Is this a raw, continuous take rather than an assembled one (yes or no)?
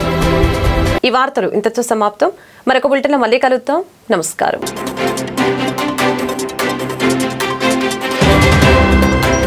yes